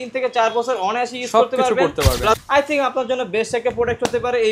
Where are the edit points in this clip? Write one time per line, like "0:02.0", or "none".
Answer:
0:02.4

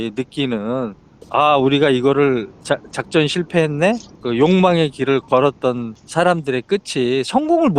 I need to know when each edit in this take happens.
0:01.1
0:04.1
0:05.9

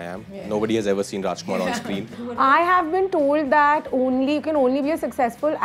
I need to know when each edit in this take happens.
0:02.3

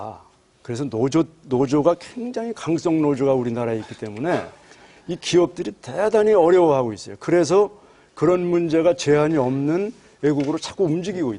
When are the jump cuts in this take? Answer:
0:06.0

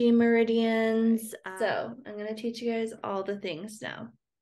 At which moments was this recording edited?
0:01.3

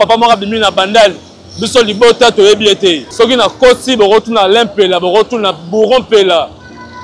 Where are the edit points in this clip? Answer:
0:03.0

